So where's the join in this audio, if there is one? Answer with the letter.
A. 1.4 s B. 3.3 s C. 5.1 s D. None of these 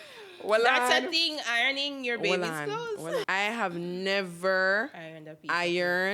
B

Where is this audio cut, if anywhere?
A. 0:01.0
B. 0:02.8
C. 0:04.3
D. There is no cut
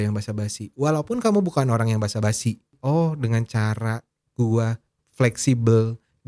B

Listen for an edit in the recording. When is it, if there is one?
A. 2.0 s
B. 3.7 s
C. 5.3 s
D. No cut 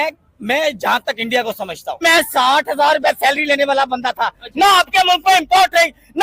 A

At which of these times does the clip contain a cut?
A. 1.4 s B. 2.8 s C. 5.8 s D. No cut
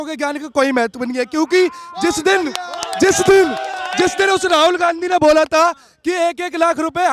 D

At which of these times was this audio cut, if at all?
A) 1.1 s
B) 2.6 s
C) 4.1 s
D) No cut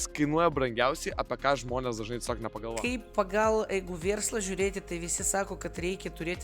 B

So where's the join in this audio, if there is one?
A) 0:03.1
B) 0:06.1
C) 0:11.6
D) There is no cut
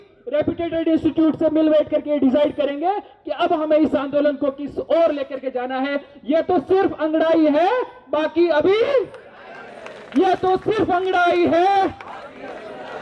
D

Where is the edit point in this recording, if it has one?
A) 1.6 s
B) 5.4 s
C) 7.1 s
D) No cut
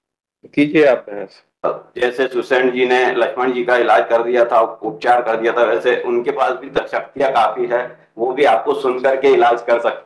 A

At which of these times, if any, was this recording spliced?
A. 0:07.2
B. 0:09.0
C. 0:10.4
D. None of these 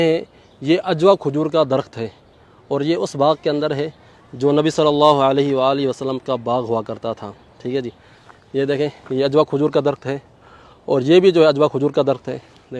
D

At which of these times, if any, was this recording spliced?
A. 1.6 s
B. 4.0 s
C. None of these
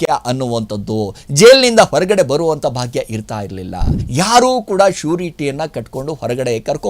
B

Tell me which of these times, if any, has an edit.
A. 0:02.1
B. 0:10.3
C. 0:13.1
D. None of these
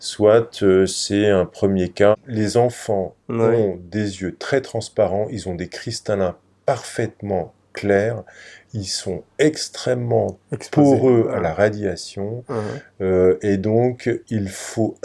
A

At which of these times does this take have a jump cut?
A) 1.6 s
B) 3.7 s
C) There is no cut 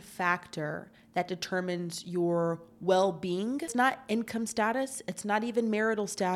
B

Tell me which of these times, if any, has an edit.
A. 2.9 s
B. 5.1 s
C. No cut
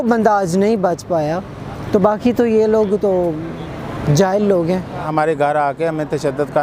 B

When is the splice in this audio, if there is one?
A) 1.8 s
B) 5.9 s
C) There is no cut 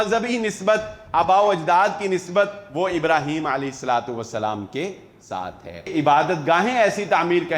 B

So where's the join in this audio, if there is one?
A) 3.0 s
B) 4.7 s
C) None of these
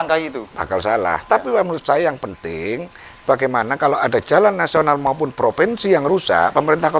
C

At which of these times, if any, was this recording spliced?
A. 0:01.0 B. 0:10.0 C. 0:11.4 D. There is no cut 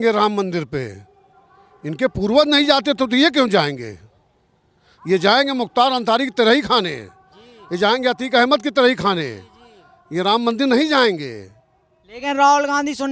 D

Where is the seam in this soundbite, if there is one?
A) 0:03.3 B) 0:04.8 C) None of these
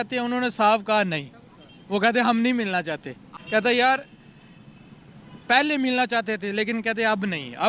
A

